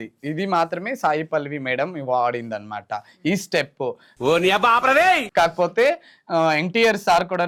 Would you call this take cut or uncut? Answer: uncut